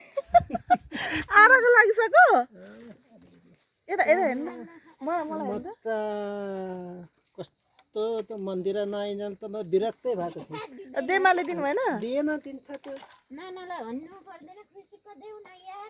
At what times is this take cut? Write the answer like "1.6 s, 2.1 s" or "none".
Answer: none